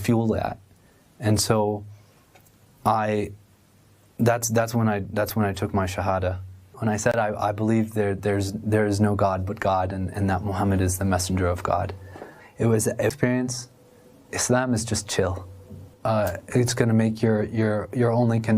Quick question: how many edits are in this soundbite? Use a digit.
1